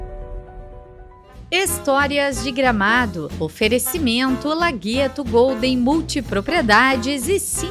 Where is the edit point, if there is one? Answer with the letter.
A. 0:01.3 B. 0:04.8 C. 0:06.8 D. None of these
A